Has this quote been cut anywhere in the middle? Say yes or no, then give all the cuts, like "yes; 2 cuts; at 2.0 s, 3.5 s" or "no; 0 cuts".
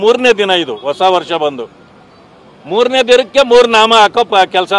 no; 0 cuts